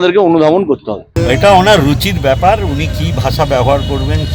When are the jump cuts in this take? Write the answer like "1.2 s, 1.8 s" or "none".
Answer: 1.1 s